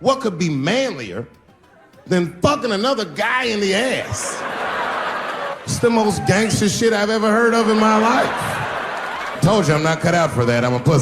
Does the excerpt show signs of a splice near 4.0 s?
no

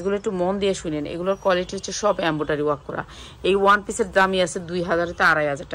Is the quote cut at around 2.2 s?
no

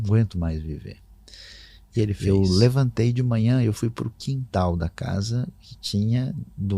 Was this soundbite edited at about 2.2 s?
yes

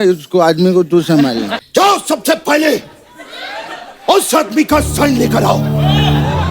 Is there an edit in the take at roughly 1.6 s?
yes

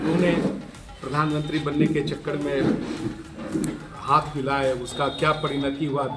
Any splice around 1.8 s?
no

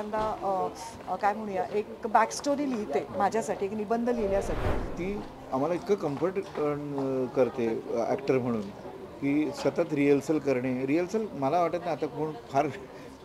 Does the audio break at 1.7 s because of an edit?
no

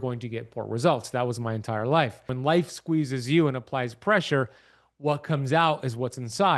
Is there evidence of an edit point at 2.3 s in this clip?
yes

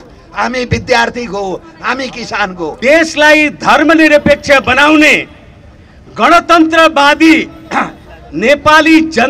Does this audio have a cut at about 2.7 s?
yes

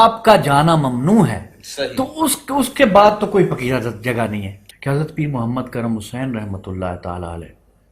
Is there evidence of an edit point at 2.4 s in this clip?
no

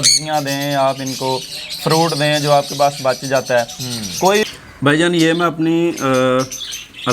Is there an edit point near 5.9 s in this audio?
no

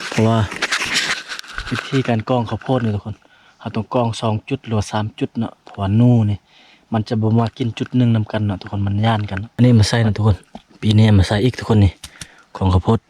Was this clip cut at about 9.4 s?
yes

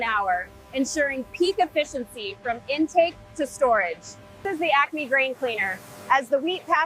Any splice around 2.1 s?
no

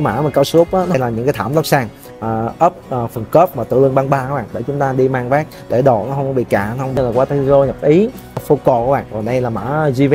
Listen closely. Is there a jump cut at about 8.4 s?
yes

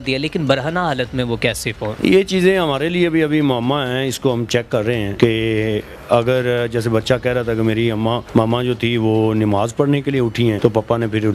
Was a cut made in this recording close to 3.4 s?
no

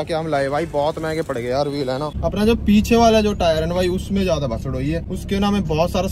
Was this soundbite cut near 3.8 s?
no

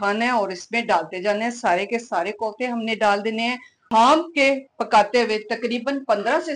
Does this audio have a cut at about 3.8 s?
yes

